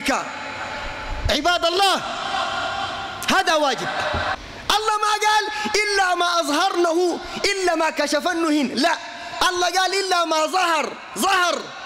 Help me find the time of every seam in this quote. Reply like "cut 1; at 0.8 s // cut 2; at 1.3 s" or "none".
cut 1; at 4.4 s